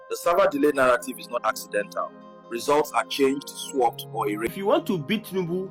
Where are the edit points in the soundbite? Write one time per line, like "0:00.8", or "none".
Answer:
0:04.5